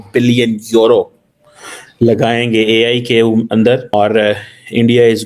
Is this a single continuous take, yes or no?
no